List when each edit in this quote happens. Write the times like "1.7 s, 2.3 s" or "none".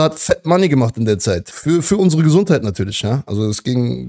1.5 s